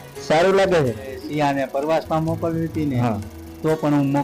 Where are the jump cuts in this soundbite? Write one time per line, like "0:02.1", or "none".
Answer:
0:01.2